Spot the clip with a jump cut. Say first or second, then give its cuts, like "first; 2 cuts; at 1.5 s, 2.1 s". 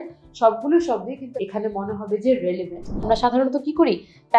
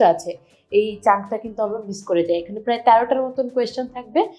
first; 2 cuts; at 1.2 s, 3.1 s